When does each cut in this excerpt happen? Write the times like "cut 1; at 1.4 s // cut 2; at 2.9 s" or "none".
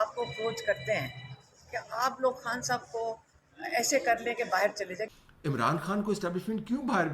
cut 1; at 5.1 s